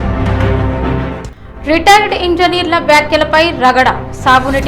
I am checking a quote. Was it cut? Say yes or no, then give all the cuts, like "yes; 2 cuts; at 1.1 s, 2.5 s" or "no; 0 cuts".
yes; 1 cut; at 0.9 s